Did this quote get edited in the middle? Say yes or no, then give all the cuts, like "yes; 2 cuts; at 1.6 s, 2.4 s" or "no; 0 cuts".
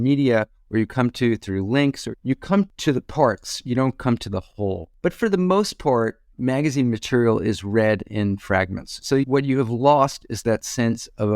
yes; 2 cuts; at 2.7 s, 4.9 s